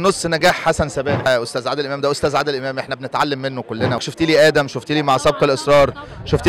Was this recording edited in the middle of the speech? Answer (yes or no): yes